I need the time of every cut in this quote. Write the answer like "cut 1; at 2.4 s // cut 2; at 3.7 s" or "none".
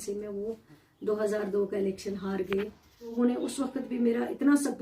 cut 1; at 3.1 s